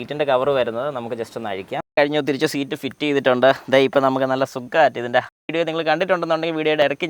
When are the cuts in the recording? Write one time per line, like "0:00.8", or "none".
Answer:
0:01.9
0:05.3